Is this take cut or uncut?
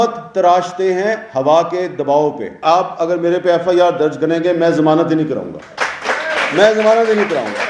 cut